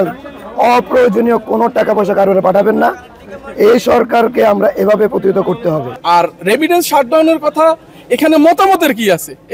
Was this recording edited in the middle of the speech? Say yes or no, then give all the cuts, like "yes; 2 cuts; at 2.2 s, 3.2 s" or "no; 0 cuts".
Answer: yes; 1 cut; at 5.9 s